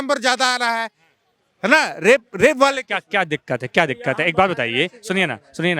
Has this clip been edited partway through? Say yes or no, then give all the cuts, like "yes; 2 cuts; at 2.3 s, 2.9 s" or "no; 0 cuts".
no; 0 cuts